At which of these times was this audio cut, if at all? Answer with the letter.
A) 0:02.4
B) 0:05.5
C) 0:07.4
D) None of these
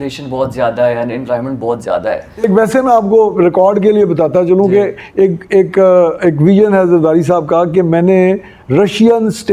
A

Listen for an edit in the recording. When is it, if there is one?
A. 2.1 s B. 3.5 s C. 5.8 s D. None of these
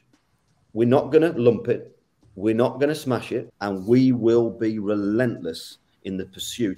B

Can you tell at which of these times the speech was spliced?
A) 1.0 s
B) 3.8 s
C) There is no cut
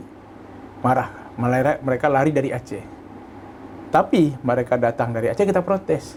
C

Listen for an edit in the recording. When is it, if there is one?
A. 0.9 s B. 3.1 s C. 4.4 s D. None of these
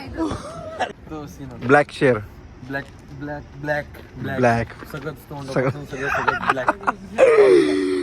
A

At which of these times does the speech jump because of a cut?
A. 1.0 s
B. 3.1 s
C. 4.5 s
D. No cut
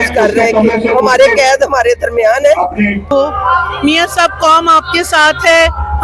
B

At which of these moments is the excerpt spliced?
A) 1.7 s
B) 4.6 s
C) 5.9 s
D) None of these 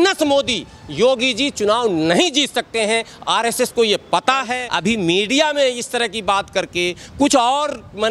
B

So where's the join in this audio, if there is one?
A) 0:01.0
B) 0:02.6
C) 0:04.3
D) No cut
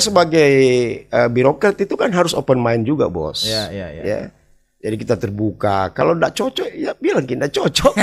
D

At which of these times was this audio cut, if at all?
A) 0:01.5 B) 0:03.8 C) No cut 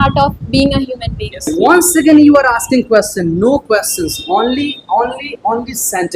A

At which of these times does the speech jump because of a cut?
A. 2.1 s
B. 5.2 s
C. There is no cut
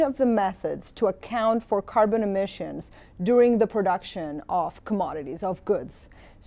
A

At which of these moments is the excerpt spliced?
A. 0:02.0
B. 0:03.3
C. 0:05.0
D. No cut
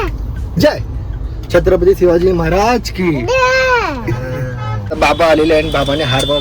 C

